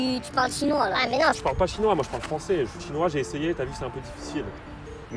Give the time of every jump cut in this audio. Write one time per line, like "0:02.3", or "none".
none